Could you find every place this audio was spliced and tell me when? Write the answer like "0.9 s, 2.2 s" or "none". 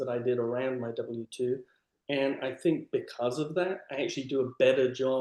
none